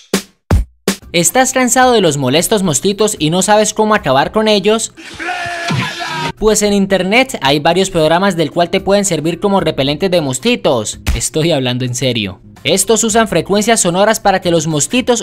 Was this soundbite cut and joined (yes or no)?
no